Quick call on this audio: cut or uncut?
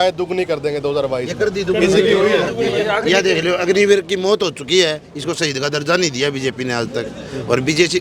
cut